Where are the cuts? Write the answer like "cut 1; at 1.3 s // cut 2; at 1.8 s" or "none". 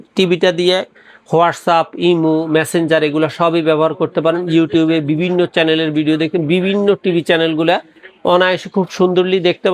none